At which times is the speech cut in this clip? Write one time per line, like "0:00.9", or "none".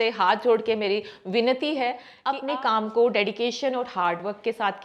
0:02.1